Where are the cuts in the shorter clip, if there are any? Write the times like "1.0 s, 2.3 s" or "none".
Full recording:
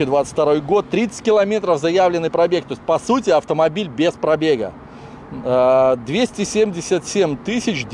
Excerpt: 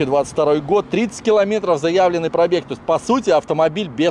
none